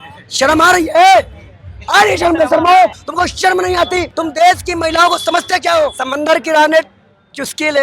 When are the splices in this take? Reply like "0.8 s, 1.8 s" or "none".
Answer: 3.0 s, 4.1 s, 6.0 s